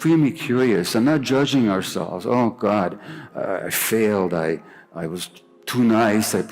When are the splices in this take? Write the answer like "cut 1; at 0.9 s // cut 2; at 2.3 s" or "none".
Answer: cut 1; at 3.3 s